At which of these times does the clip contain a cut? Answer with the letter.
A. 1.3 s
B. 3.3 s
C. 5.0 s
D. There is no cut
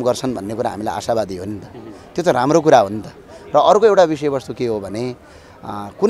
D